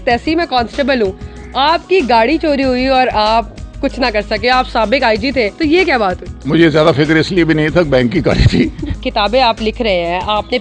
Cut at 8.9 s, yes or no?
yes